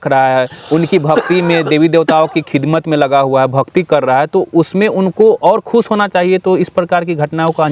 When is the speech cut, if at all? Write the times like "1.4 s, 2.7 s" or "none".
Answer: none